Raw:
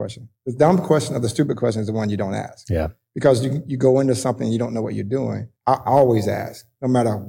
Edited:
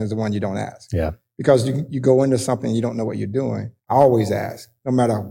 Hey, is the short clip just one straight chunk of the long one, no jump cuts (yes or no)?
no